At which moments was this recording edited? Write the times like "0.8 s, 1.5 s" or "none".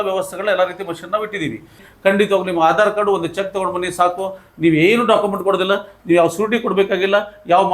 1.8 s

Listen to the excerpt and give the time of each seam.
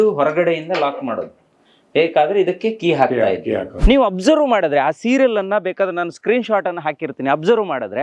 3.7 s

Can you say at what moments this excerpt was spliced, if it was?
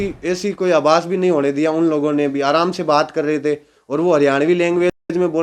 none

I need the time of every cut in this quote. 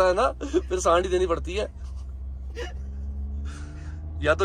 none

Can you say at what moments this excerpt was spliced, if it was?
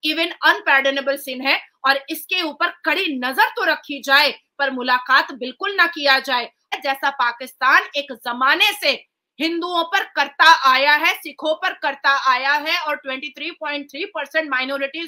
6.7 s

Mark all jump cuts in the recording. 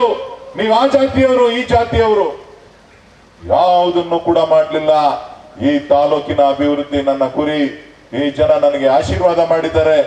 none

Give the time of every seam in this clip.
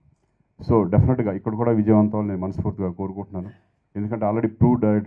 none

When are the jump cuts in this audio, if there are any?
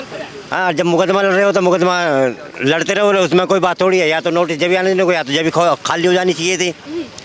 none

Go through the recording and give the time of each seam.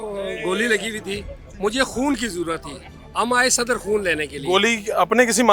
none

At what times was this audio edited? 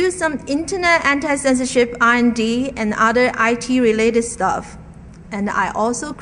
none

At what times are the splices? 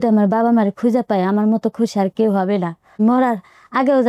3.0 s

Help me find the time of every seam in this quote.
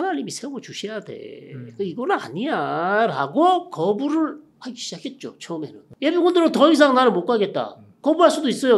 5.8 s

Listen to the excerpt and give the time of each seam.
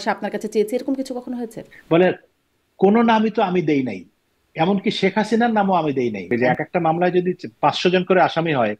1.7 s, 6.3 s

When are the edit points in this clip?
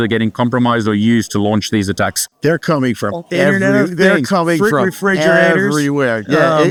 none

